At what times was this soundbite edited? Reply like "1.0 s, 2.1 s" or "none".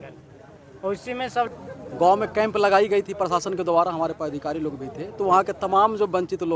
1.5 s